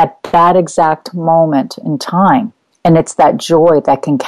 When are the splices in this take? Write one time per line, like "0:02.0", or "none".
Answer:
0:02.6